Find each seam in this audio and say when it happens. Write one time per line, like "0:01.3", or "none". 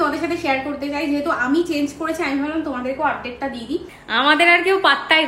0:04.0